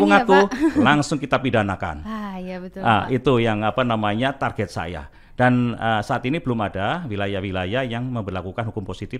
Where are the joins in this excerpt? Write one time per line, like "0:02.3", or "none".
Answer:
none